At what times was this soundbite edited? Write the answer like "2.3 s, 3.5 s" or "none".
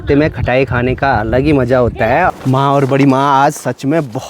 2.3 s